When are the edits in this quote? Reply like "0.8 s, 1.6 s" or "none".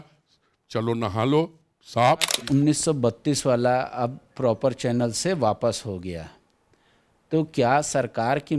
2.4 s